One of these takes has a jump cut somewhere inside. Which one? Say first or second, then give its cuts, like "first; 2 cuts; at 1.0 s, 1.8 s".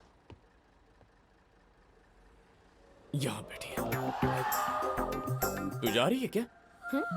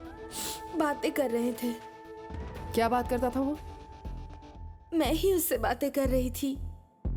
first; 1 cut; at 5.7 s